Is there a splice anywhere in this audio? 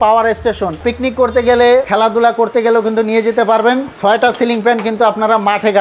yes; 3 cuts; at 0.8 s, 1.9 s, 3.9 s

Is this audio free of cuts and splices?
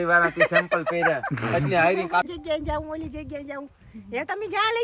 no; 1 cut; at 2.3 s

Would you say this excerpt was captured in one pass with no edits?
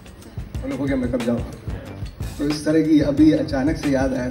yes; 0 cuts

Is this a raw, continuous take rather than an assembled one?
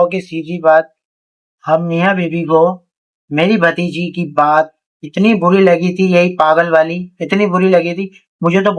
yes; 0 cuts

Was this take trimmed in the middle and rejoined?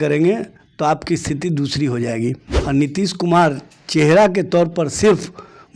yes; 1 cut; at 2.5 s

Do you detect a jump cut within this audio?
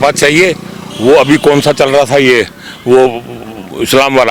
no; 0 cuts

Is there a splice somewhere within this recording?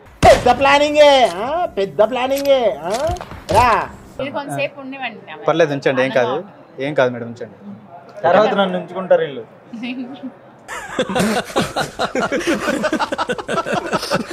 yes; 1 cut; at 4.2 s

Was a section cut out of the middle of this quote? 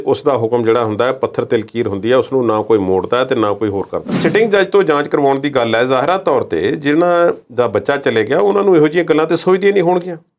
yes; 1 cut; at 4.2 s

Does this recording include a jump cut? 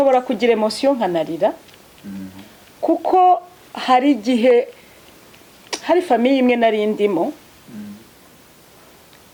no; 0 cuts

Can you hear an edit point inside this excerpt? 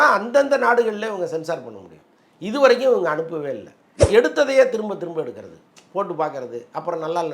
yes; 1 cut; at 4.0 s

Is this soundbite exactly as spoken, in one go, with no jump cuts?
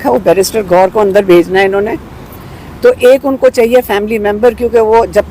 yes; 0 cuts

